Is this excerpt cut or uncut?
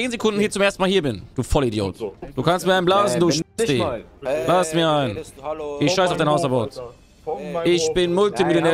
cut